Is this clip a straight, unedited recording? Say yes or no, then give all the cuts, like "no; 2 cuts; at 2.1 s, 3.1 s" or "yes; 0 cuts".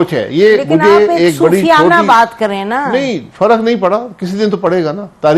no; 1 cut; at 3.3 s